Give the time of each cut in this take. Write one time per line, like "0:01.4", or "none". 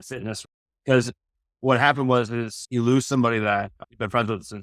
none